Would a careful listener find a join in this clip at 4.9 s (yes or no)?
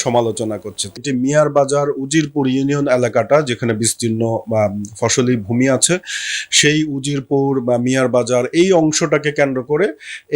no